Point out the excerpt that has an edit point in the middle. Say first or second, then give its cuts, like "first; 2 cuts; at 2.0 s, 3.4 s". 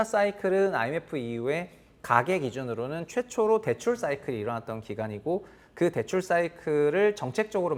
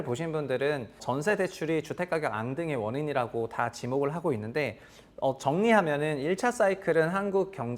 second; 1 cut; at 1.0 s